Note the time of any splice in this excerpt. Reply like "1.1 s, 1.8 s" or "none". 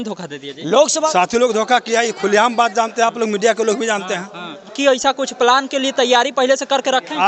1.1 s, 4.7 s